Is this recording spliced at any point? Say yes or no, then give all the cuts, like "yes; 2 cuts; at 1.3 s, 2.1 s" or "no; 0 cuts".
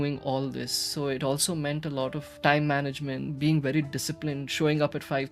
yes; 2 cuts; at 2.3 s, 3.3 s